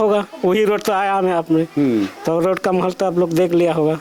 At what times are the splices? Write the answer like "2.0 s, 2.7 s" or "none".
none